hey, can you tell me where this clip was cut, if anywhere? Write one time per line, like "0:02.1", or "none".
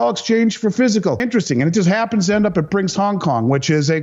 0:01.2